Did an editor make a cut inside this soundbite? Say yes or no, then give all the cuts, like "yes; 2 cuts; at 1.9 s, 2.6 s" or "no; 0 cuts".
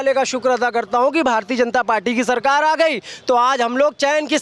no; 0 cuts